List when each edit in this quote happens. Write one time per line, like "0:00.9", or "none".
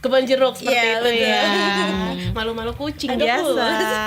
none